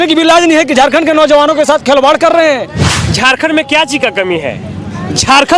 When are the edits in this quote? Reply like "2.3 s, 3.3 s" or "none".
3.0 s